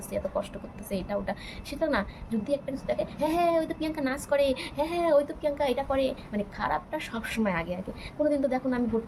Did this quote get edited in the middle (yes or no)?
no